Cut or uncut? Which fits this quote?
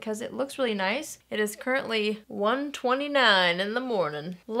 cut